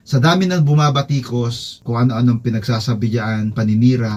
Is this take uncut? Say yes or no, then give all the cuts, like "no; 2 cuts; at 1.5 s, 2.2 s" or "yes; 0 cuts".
yes; 0 cuts